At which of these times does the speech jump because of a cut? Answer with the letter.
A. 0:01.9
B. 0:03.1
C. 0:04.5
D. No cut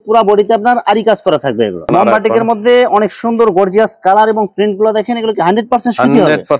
A